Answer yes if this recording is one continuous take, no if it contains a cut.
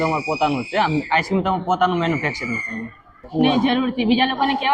no